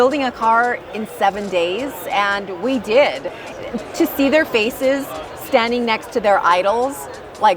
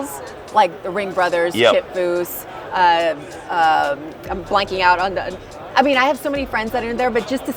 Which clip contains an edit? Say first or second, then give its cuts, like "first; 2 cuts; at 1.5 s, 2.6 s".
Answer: first; 1 cut; at 3.3 s